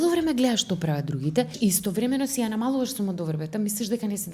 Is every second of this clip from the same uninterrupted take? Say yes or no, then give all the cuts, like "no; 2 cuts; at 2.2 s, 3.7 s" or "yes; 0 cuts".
no; 1 cut; at 1.5 s